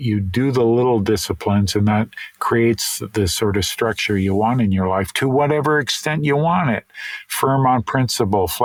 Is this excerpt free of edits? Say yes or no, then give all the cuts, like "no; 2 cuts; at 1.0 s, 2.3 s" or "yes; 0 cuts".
yes; 0 cuts